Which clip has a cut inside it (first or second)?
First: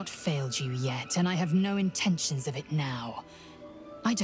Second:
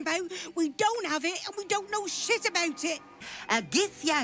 second